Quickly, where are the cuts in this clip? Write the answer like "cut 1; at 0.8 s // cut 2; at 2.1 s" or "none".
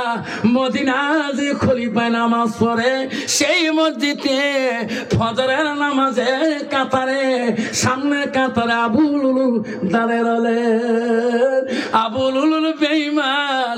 none